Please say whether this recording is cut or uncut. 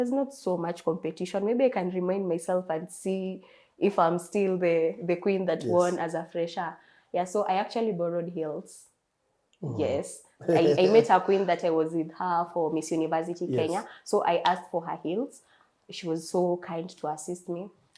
uncut